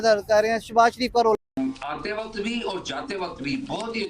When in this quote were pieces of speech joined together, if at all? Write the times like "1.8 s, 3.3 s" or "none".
1.4 s